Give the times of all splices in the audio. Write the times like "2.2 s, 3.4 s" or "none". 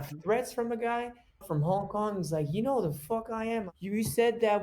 1.4 s, 3.6 s